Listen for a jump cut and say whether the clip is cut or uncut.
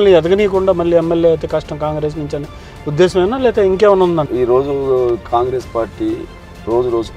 cut